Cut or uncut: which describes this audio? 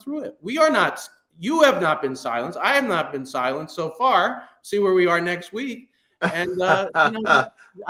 uncut